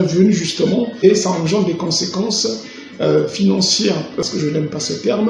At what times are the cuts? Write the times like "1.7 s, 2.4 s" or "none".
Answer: 1.0 s, 4.2 s

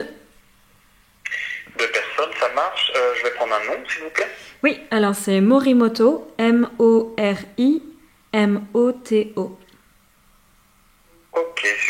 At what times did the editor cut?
none

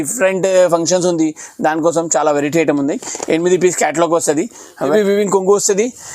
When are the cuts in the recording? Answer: 4.9 s

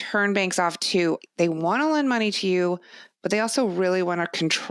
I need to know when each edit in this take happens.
1.2 s

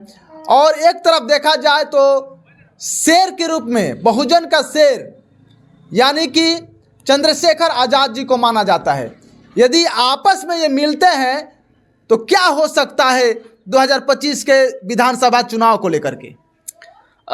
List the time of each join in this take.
none

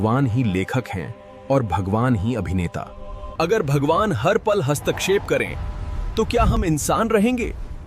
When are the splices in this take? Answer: 3.4 s

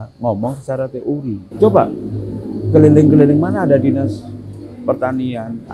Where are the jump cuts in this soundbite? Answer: 1.4 s

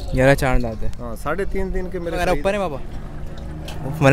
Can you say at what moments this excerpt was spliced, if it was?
2.2 s

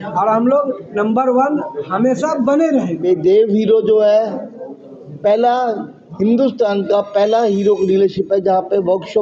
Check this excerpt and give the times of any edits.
3.0 s

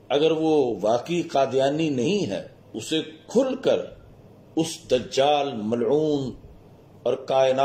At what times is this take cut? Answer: 2.7 s

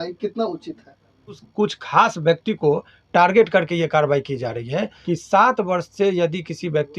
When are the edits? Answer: 1.4 s, 5.0 s

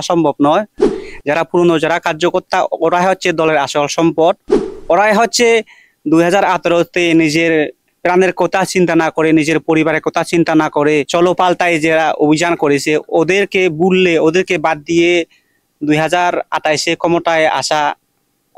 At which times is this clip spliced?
11.1 s

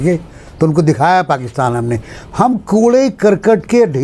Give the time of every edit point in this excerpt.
none

